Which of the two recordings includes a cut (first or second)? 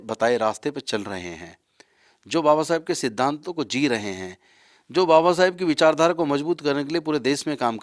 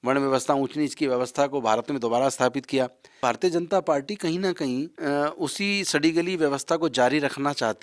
second